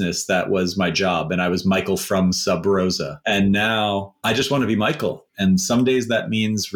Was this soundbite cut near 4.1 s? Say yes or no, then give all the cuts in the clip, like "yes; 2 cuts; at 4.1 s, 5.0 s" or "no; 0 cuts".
yes; 3 cuts; at 3.1 s, 4.1 s, 5.3 s